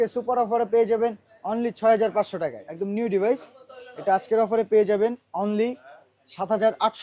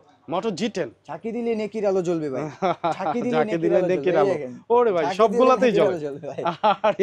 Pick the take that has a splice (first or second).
first